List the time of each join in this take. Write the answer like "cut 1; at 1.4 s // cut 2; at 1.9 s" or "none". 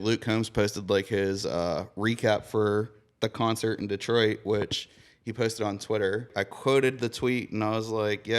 cut 1; at 6.4 s

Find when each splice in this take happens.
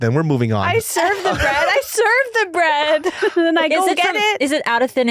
none

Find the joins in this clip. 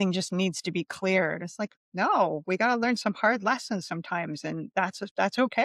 none

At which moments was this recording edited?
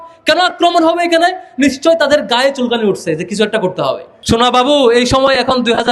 cut 1; at 4.1 s

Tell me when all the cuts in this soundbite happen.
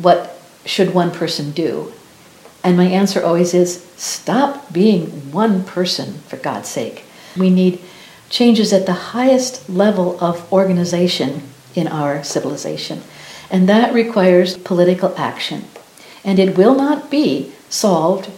cut 1; at 7.3 s // cut 2; at 14.6 s

